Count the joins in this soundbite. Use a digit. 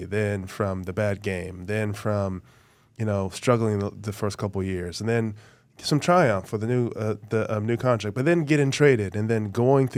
0